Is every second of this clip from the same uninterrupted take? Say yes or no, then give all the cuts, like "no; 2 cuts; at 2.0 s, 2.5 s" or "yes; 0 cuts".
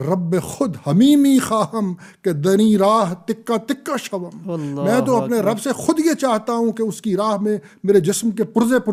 yes; 0 cuts